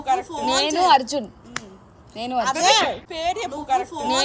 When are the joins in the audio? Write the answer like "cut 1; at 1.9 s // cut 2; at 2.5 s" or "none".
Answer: none